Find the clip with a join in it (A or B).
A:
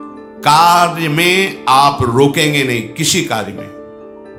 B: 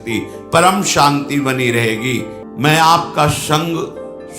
B